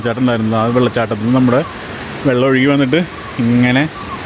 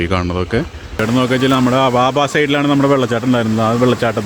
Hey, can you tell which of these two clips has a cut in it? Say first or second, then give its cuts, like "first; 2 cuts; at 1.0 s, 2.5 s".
second; 1 cut; at 1.0 s